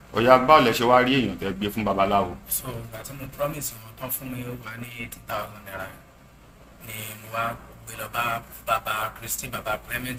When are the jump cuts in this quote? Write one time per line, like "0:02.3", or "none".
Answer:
none